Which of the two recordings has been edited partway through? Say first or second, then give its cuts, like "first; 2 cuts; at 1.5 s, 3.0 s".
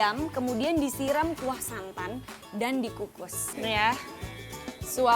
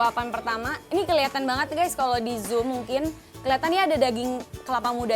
first; 1 cut; at 3.4 s